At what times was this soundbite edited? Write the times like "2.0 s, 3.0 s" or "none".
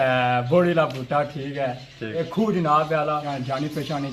2.2 s, 3.3 s